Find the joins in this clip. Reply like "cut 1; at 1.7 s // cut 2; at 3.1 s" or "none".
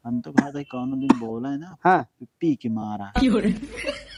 none